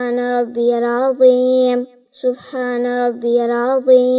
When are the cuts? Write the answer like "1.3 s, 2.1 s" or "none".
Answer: 2.0 s